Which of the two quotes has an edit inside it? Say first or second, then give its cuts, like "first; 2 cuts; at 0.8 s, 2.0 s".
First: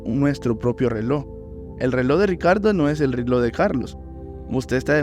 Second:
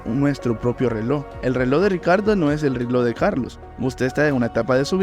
second; 2 cuts; at 1.3 s, 3.6 s